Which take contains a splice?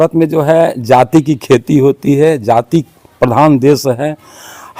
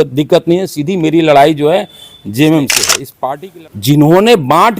second; 1 cut; at 3.3 s

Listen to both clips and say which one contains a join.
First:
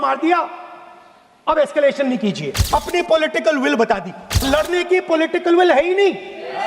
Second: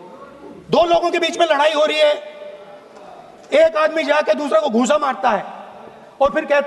first; 2 cuts; at 2.5 s, 4.4 s

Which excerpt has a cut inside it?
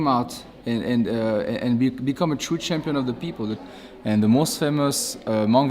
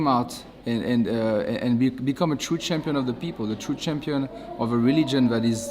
first; 1 cut; at 3.6 s

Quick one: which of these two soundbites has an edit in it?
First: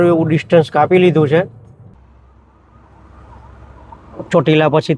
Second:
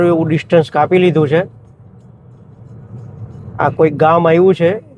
first; 1 cut; at 1.9 s

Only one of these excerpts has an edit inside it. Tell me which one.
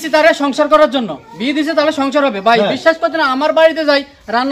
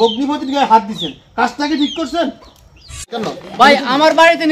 second; 1 cut; at 3.2 s

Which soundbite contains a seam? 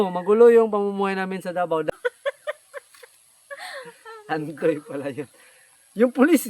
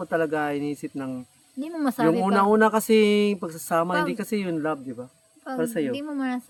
first; 1 cut; at 1.9 s

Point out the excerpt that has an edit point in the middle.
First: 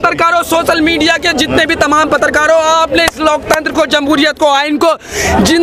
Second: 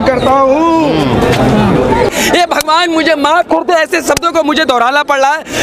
second; 1 cut; at 2.1 s

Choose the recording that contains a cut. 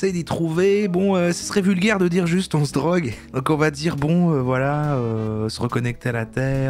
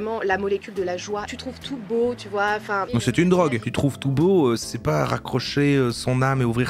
second; 3 cuts; at 1.3 s, 2.9 s, 4.7 s

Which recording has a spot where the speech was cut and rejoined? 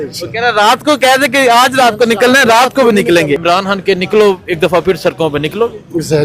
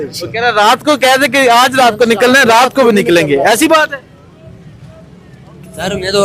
first; 1 cut; at 3.4 s

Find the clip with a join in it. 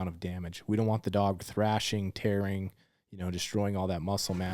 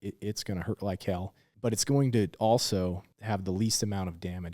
second; 2 cuts; at 1.4 s, 3.1 s

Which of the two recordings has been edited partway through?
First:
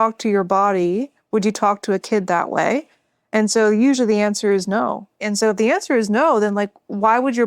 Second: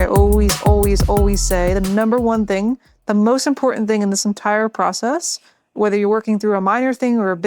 first; 1 cut; at 5.3 s

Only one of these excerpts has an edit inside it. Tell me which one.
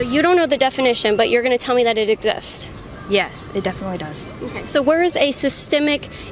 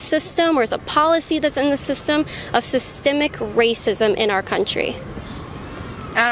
first; 2 cuts; at 3.8 s, 4.9 s

